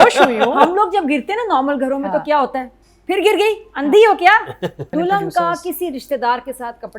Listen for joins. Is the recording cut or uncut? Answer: cut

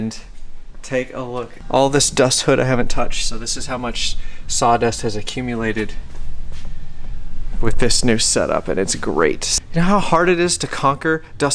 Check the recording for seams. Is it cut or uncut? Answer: cut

